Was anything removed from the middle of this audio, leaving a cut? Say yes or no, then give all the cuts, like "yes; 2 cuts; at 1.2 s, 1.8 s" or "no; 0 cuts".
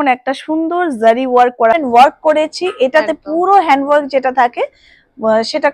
yes; 1 cut; at 1.7 s